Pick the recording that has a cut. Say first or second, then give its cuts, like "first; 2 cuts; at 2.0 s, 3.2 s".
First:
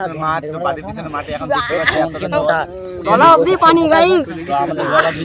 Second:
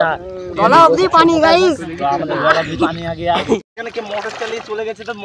second; 1 cut; at 3.8 s